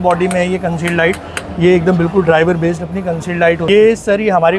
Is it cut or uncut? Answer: cut